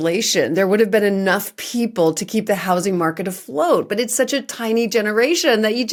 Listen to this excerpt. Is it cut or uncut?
uncut